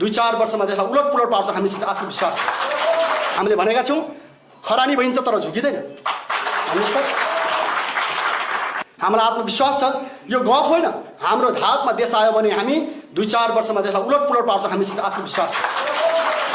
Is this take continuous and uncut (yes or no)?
no